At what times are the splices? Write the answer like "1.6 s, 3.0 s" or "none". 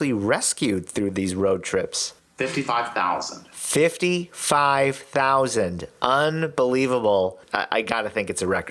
none